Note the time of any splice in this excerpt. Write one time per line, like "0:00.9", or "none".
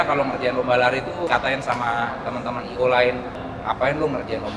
0:01.3
0:03.3